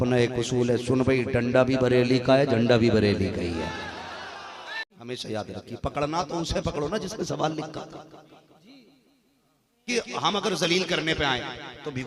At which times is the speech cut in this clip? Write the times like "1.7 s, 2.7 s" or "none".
4.9 s, 9.8 s